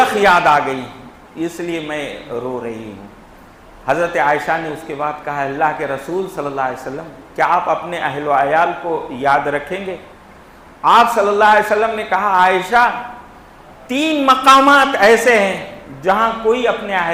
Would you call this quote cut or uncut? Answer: uncut